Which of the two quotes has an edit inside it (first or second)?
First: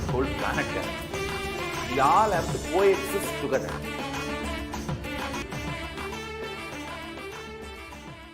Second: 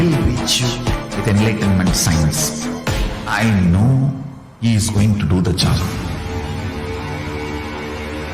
first